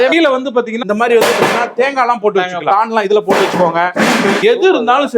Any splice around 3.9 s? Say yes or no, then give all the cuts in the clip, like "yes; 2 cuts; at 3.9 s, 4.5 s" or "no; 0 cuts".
yes; 1 cut; at 3.9 s